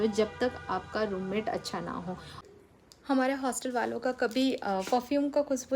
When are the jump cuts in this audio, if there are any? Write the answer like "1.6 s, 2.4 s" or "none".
2.4 s